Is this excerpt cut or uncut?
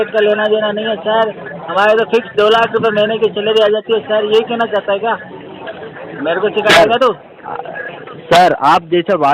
uncut